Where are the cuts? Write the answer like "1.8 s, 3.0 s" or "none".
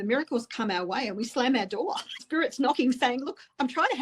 2.2 s